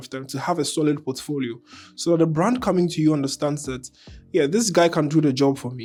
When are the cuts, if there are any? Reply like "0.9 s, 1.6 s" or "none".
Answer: none